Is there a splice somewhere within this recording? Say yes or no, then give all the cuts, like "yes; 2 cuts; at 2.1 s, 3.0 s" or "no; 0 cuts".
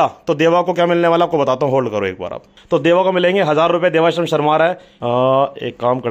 yes; 2 cuts; at 2.5 s, 4.9 s